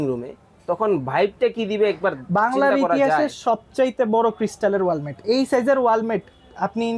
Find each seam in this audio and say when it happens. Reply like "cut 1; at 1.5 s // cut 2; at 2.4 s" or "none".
none